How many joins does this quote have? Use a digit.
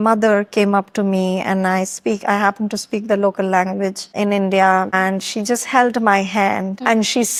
0